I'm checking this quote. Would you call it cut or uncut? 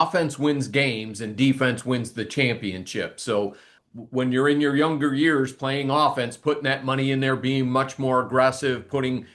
cut